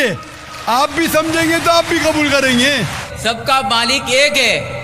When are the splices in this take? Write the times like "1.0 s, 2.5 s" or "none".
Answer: 3.0 s